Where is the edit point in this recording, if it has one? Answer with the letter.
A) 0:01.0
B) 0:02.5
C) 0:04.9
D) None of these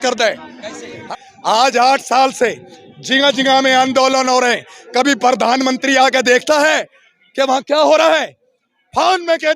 A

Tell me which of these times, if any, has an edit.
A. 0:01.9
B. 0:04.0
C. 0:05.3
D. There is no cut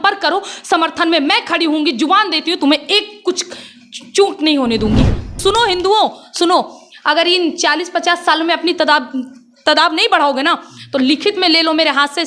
C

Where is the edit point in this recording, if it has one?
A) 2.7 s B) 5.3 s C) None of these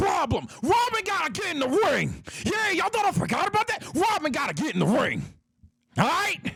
C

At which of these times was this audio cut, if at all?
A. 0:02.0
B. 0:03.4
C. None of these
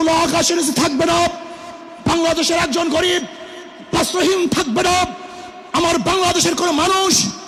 C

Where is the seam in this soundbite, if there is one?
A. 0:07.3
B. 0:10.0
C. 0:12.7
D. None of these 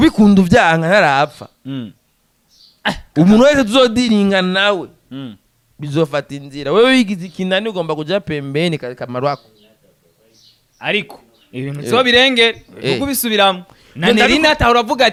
D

